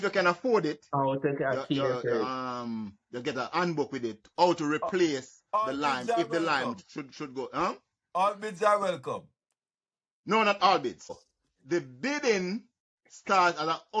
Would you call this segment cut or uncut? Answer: cut